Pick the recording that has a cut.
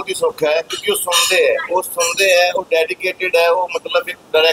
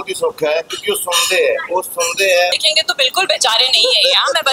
second; 1 cut; at 2.5 s

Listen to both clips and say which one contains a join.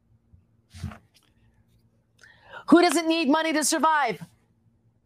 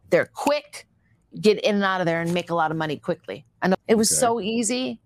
second; 1 cut; at 3.8 s

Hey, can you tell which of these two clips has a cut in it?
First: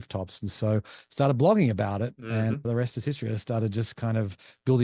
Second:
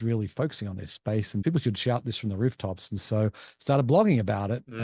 second; 1 cut; at 1.4 s

